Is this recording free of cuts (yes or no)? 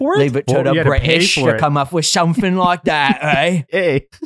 yes